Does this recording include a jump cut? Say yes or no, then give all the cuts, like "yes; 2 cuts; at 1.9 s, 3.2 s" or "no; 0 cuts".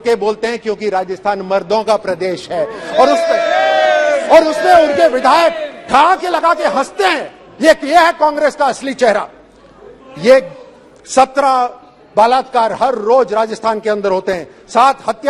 no; 0 cuts